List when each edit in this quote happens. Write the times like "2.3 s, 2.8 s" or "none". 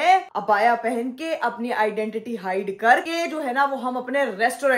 3.1 s